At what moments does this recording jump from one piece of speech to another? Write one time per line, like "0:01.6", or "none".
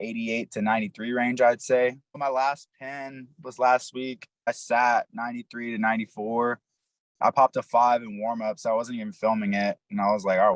0:02.2
0:04.5